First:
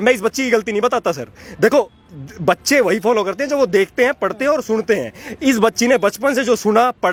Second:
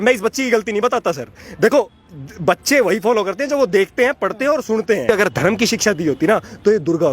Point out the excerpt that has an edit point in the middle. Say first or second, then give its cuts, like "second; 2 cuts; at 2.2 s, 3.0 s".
second; 1 cut; at 5.1 s